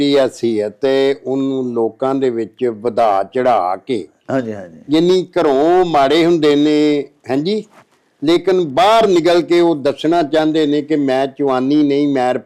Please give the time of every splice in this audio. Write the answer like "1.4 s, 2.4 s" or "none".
none